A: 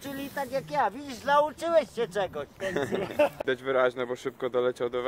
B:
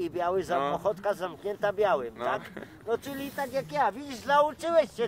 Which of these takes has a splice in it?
A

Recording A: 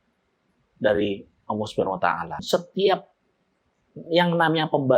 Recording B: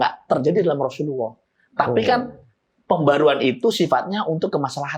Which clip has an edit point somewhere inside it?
A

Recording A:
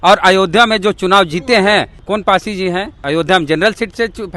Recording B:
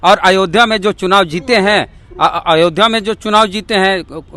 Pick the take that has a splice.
A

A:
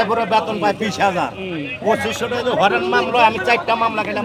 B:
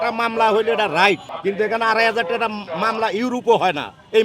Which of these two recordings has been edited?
B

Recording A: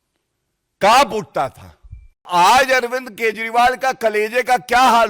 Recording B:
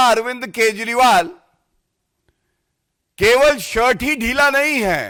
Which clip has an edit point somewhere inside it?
A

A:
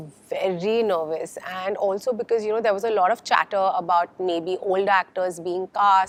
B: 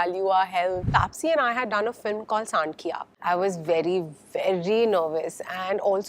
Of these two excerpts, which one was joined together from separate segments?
B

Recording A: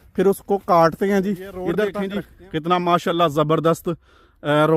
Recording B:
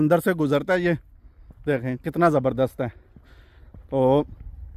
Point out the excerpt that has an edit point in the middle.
A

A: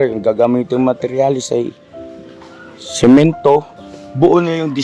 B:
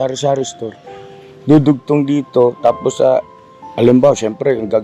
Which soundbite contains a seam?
A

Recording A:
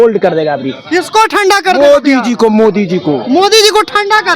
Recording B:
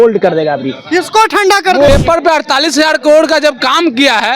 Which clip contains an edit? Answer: B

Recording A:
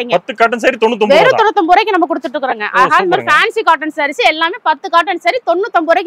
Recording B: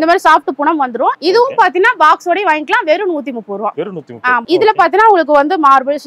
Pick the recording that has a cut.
B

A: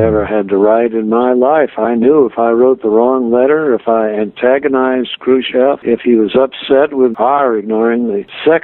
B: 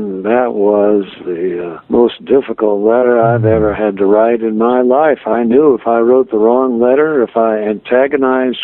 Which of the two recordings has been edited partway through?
A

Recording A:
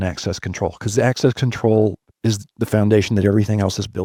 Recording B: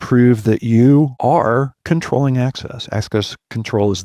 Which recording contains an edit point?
B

